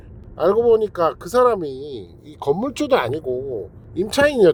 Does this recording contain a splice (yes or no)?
no